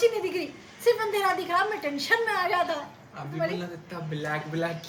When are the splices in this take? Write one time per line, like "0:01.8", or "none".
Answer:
none